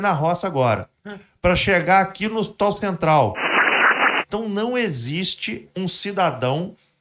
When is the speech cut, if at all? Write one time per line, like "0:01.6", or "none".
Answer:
0:03.9